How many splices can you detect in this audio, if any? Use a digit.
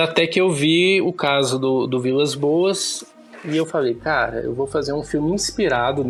0